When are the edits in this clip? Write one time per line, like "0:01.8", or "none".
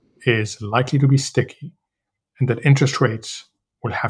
none